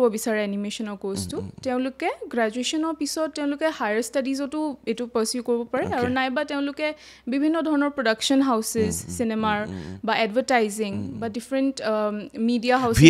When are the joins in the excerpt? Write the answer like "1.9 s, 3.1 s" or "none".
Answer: none